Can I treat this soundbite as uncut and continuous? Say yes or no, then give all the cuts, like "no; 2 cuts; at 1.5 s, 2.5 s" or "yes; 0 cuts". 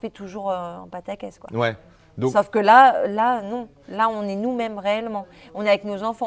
yes; 0 cuts